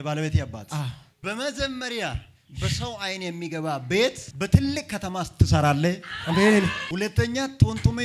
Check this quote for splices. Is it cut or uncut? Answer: cut